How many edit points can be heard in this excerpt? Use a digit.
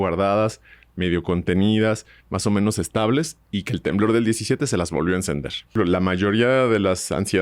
1